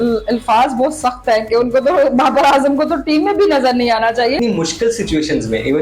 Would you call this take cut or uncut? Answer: cut